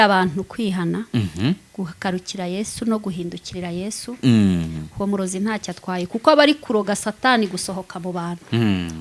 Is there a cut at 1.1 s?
no; 0 cuts

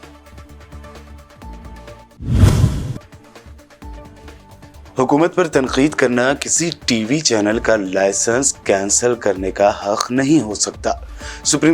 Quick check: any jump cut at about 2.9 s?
no; 1 cut; at 1.3 s

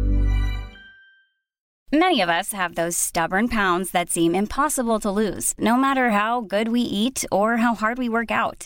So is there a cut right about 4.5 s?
no; 1 cut; at 1.8 s

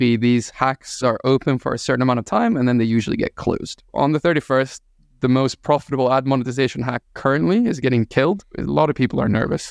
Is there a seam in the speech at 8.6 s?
yes; 3 cuts; at 1.0 s, 3.8 s, 8.6 s

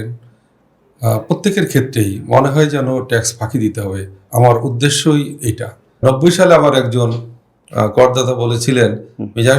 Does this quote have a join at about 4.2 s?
no; 1 cut; at 6.0 s

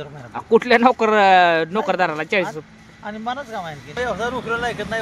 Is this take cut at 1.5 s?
no; 1 cut; at 4.0 s

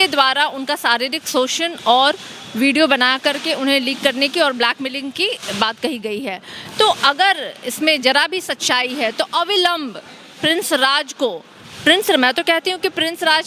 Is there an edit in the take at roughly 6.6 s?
no; 0 cuts

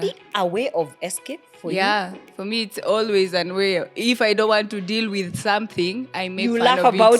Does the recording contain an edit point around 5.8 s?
no; 0 cuts

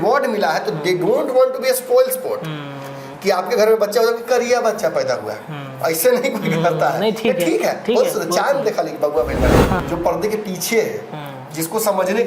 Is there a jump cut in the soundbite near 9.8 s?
yes; 1 cut; at 9.8 s

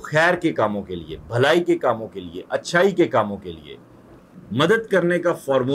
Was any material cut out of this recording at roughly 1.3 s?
no; 1 cut; at 4.3 s

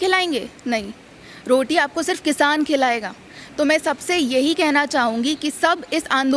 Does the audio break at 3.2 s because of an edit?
no; 0 cuts

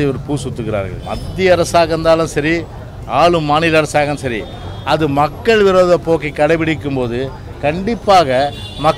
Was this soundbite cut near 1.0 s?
yes; 1 cut; at 1.0 s

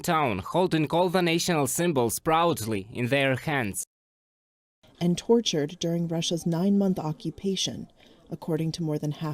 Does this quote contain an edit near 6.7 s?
no; 1 cut; at 4.5 s

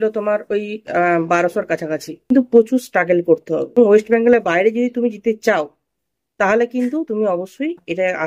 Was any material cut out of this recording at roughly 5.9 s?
no; 2 cuts; at 2.3 s, 3.8 s

